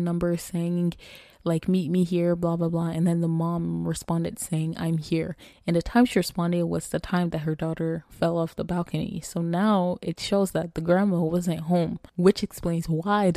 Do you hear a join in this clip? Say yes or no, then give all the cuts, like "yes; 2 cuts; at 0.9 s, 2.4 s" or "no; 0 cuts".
yes; 1 cut; at 12.0 s